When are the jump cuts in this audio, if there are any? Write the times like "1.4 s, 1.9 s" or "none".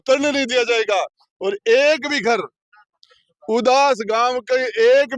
none